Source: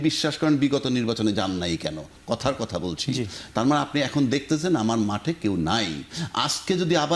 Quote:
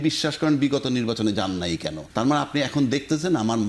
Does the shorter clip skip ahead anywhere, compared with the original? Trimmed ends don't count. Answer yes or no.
yes